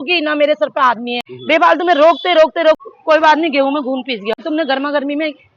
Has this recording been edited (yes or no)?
yes